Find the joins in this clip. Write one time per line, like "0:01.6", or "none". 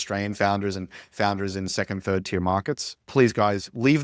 0:03.0